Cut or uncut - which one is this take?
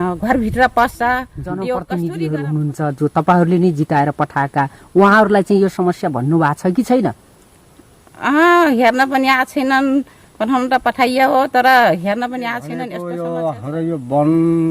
cut